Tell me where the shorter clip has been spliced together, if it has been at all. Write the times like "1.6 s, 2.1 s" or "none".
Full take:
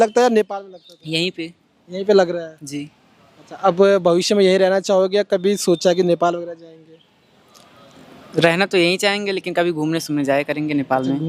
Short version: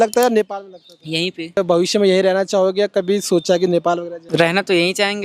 1.6 s, 4.1 s

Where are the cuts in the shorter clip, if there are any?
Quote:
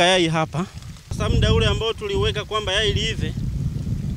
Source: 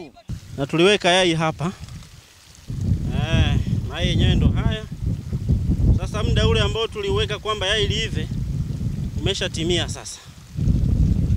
1.1 s

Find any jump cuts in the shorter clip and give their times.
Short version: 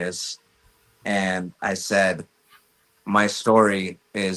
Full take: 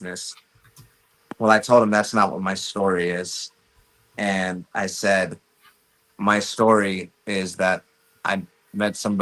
none

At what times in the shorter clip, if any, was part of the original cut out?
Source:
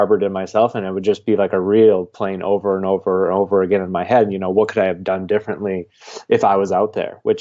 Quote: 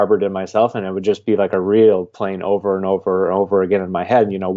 none

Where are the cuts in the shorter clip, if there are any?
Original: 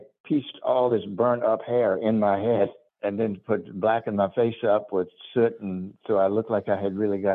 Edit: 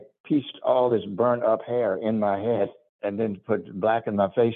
none

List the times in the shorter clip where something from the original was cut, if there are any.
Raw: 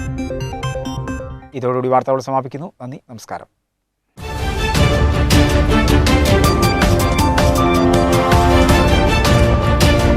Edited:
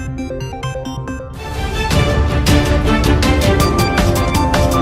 1.3 s

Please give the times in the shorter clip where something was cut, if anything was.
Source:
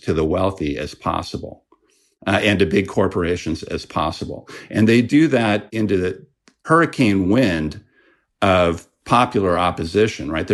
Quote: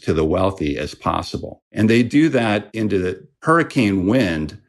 1.6 s, 3.2 s

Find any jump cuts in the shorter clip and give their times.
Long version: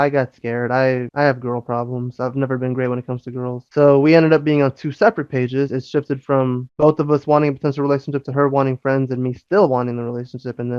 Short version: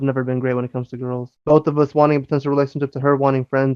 1.3 s

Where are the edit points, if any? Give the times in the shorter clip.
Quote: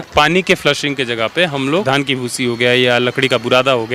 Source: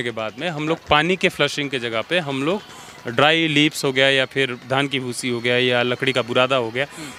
1.8 s

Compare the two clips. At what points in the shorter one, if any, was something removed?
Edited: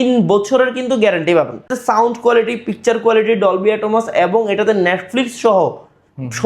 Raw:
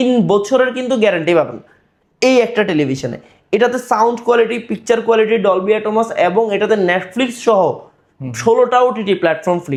1.8 s

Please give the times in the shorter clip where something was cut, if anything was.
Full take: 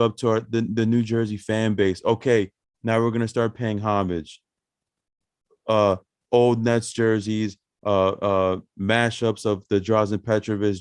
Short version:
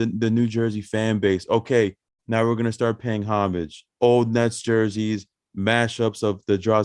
3.8 s, 5.4 s

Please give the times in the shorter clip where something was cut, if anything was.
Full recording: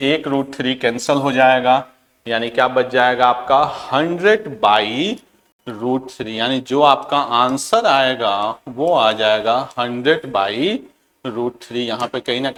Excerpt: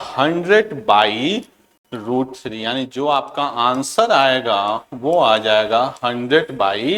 none

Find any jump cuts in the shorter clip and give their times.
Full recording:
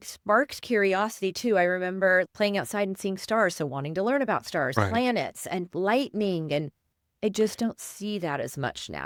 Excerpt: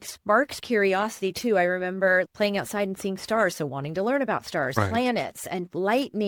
none

